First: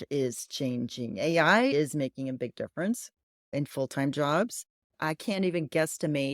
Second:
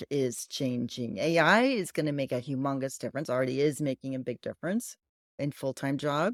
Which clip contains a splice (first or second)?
first